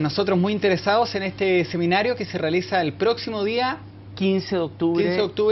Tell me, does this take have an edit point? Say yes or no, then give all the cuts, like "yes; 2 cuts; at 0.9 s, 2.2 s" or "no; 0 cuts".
yes; 1 cut; at 1.0 s